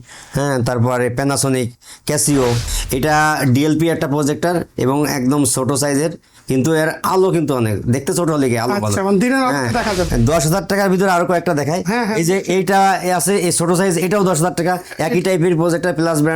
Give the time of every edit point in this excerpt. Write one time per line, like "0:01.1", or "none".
0:02.7
0:10.1